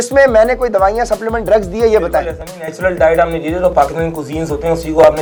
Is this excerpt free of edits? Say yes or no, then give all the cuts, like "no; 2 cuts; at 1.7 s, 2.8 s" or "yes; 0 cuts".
yes; 0 cuts